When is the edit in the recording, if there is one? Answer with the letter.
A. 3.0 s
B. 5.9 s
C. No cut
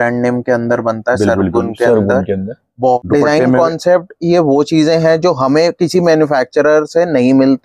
A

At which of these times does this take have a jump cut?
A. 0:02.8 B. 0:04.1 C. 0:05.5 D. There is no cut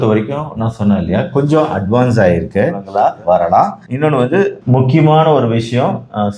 A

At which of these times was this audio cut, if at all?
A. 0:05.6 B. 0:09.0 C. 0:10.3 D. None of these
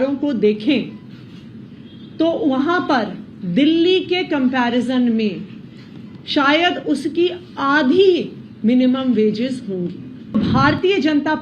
C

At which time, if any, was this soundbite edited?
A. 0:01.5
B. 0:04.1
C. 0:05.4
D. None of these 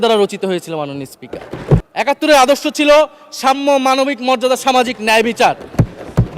A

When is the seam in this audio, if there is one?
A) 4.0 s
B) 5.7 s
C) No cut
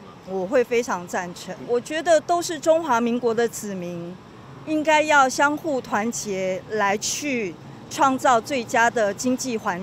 C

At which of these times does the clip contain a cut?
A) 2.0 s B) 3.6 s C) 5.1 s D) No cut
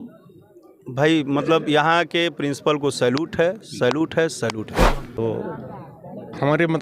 C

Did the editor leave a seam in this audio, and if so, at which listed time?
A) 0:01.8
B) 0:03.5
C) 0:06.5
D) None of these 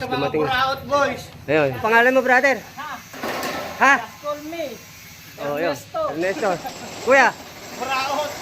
A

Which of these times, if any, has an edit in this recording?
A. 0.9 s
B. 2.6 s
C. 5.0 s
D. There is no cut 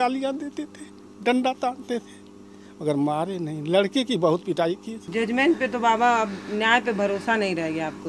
C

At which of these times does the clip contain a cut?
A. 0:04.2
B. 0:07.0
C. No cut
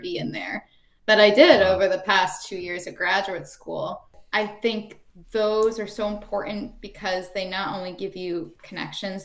A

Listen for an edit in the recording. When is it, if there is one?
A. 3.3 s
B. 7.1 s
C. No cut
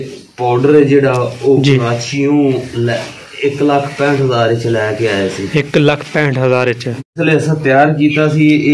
B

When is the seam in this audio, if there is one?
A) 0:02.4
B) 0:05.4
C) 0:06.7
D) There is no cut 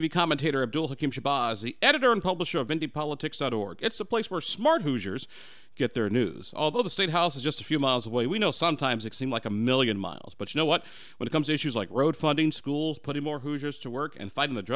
D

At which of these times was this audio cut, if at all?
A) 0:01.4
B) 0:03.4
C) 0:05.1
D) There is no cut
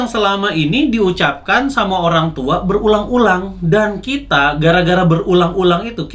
D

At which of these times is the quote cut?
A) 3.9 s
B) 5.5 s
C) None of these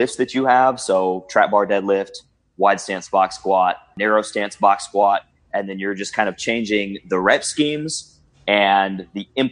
A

